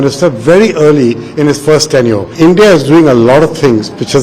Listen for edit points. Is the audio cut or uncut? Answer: cut